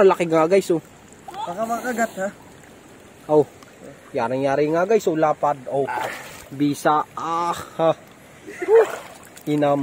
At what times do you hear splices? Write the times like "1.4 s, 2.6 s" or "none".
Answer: none